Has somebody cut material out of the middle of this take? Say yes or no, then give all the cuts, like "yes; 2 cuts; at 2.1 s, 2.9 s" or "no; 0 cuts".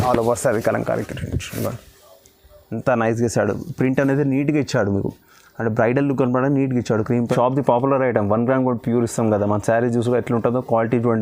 yes; 1 cut; at 7.3 s